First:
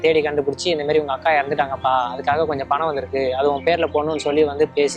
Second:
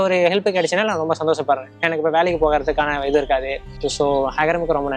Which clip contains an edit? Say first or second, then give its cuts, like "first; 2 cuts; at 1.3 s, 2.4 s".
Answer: second; 1 cut; at 3.6 s